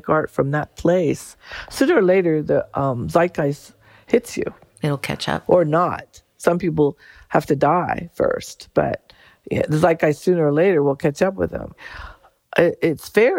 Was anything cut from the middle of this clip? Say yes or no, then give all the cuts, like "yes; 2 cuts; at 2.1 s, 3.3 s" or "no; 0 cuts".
no; 0 cuts